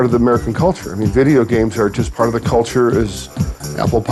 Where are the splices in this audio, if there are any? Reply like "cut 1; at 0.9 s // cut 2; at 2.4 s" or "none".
cut 1; at 2.0 s